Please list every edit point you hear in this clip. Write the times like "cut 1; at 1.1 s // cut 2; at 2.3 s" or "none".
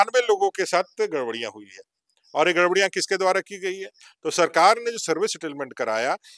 none